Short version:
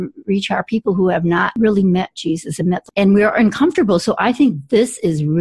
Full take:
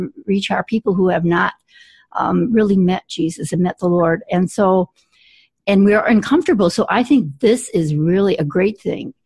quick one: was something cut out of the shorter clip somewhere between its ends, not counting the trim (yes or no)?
yes